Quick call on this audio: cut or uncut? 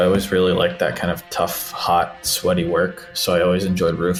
uncut